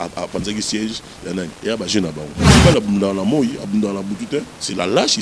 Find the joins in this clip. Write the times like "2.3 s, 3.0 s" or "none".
2.5 s

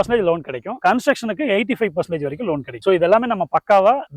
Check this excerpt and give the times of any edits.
none

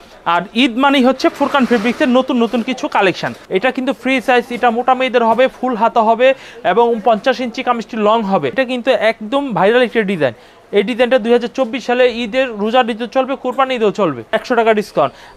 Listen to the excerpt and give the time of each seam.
3.3 s, 8.6 s, 14.2 s

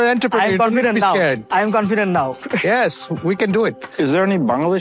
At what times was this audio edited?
none

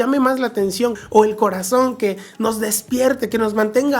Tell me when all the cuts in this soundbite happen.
1.0 s

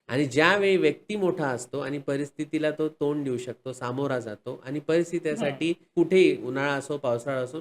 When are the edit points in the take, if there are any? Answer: 5.8 s

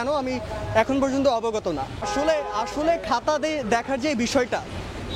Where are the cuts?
none

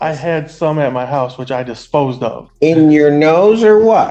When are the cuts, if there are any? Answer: 2.5 s

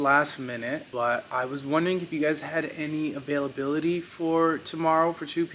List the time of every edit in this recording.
none

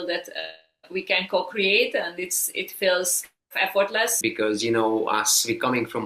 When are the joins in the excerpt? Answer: 4.1 s

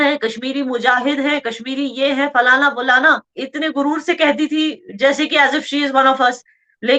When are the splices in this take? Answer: 3.4 s

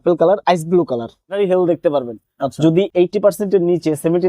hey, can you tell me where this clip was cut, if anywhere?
1.3 s

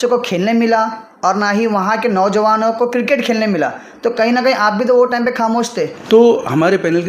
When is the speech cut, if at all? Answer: 6.0 s

